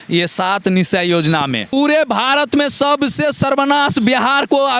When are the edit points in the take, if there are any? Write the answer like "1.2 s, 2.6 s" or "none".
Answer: 1.7 s